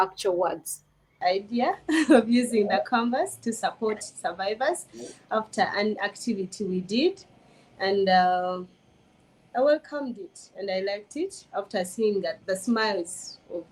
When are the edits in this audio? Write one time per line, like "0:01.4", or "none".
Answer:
0:01.2